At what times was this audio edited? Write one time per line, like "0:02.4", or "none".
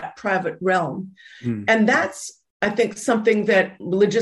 none